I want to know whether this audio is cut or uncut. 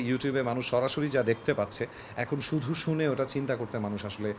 uncut